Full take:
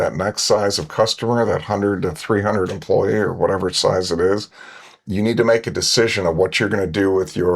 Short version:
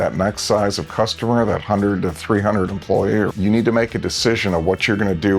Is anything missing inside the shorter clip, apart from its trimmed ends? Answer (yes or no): yes